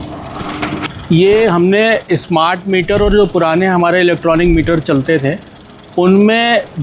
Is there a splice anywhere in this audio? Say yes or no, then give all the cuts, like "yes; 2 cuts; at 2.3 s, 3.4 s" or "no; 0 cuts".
no; 0 cuts